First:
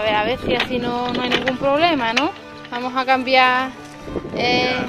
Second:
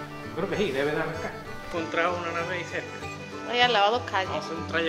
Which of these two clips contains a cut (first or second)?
second